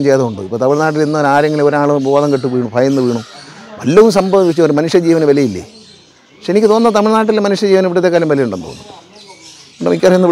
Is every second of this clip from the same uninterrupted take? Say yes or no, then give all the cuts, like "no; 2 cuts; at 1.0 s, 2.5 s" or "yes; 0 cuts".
yes; 0 cuts